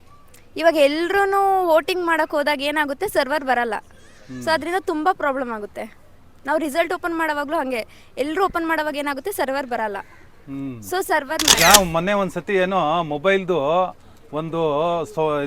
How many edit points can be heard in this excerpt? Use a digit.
1